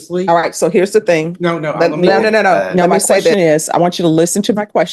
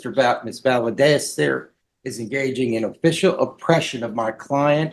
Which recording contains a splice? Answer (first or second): first